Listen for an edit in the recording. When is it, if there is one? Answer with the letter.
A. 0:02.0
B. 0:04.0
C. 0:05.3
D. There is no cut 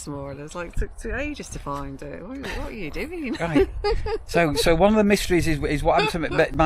D